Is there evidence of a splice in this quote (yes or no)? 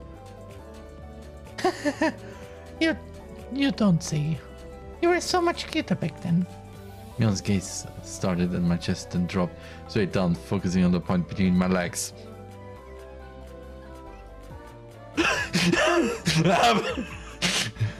no